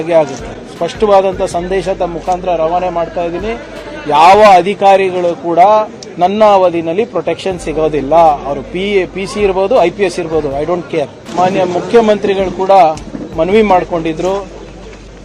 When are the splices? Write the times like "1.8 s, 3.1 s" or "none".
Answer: 11.2 s